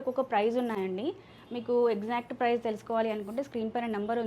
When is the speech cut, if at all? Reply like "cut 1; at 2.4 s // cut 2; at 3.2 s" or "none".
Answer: none

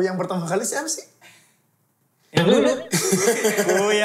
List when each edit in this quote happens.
none

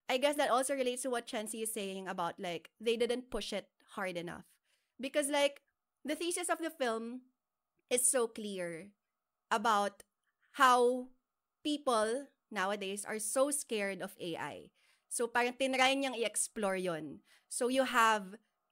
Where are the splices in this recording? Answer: none

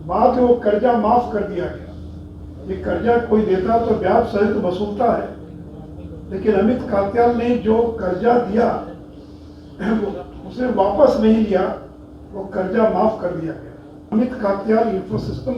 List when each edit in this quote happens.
cut 1; at 14.0 s

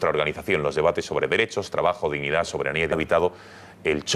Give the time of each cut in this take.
none

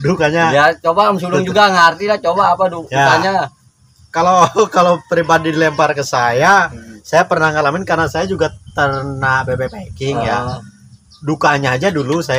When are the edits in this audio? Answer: none

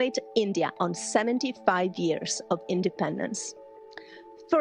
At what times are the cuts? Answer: none

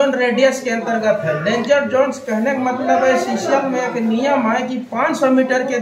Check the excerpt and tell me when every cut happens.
none

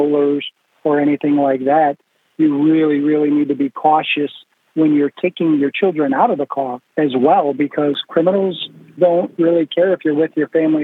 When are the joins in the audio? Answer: cut 1; at 8.9 s

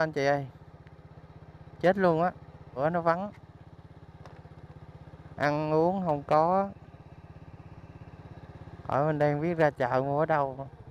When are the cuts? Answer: cut 1; at 2.8 s

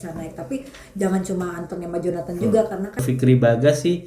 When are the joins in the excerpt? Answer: cut 1; at 3.0 s

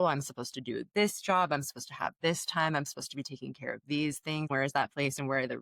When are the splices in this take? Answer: cut 1; at 4.5 s

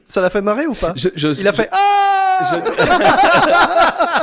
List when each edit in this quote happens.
none

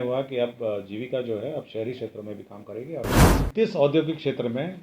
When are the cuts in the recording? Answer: cut 1; at 3.2 s

